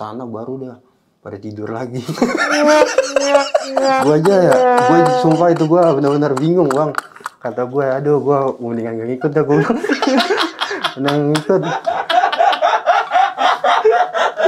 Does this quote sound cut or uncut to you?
uncut